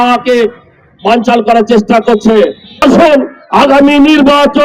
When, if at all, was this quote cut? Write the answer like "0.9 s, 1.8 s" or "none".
2.8 s